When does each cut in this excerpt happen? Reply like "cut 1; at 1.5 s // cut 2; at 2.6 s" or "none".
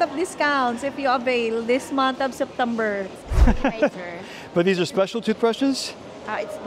cut 1; at 3.2 s